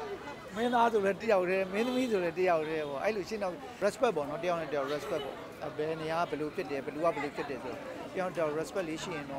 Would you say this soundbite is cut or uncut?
cut